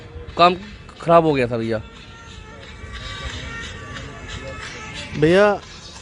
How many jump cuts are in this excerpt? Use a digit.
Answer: 0